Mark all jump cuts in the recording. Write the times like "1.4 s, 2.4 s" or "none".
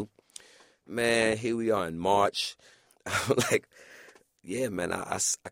2.9 s